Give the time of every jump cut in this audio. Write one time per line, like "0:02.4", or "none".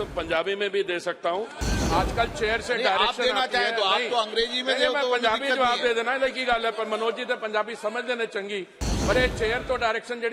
0:01.6